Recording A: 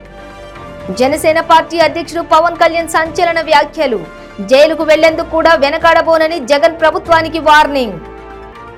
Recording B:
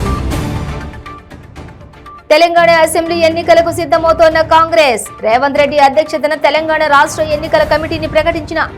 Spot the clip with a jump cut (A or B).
B